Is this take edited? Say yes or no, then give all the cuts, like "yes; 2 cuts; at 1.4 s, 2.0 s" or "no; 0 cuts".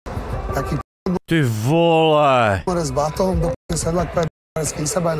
no; 0 cuts